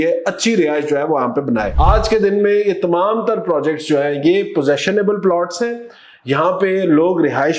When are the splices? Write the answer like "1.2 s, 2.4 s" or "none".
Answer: 1.7 s